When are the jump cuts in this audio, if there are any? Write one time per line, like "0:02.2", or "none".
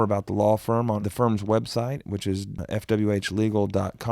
0:01.0
0:02.6

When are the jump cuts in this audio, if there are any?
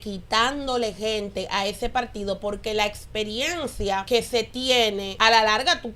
0:04.0
0:05.1

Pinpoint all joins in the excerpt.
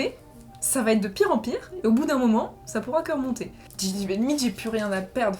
0:03.6

